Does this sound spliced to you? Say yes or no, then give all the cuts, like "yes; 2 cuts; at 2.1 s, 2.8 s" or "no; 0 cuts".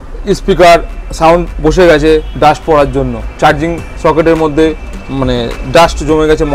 no; 0 cuts